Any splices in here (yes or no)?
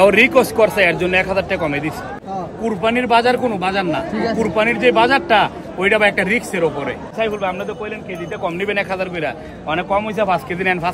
yes